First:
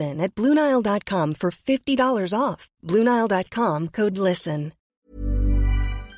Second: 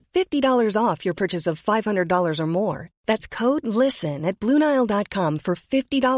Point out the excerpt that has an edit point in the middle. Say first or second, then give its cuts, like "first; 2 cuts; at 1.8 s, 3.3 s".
first; 1 cut; at 5.0 s